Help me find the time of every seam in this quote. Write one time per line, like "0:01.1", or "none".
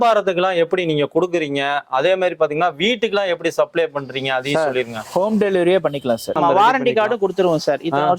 0:06.4

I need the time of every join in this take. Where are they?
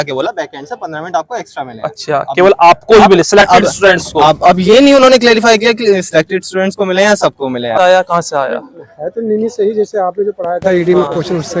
0:07.8

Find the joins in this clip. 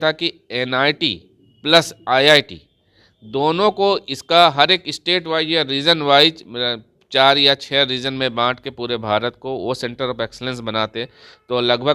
none

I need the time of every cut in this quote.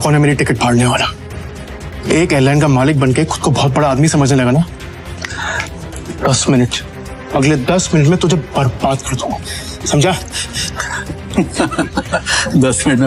none

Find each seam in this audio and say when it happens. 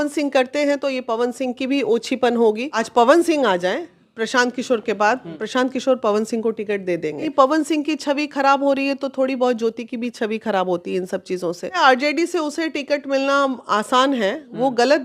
0:02.7
0:05.3
0:07.3
0:11.8

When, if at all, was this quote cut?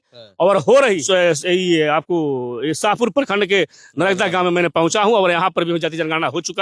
0:01.0

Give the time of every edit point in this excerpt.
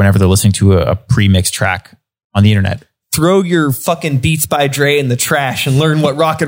none

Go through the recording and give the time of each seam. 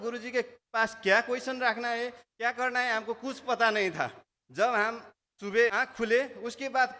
0:05.7

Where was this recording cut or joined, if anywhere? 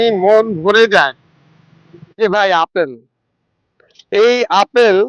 0:02.0

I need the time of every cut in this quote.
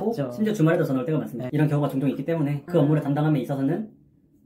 0:01.4
0:02.6

